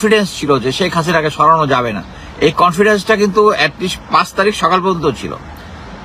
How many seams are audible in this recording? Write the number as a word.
zero